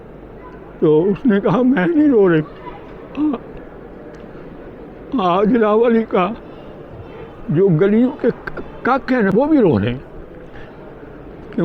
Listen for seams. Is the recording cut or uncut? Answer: cut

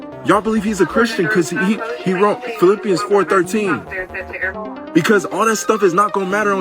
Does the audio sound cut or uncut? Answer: cut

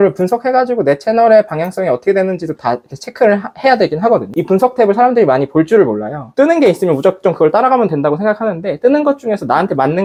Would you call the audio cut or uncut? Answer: uncut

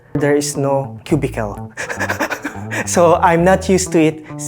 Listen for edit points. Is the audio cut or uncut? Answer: cut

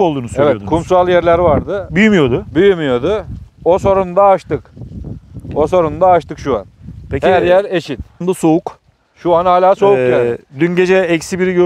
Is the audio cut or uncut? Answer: cut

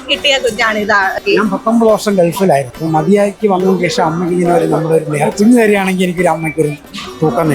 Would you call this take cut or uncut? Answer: cut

